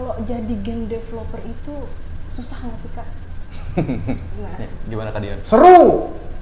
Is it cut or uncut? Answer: uncut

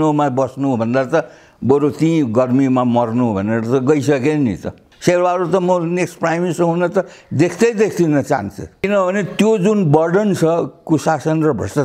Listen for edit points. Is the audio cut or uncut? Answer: cut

